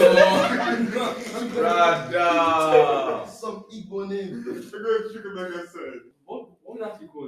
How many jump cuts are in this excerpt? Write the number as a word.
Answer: one